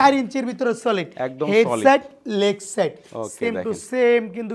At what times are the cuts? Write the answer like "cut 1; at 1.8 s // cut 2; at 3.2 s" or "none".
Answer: none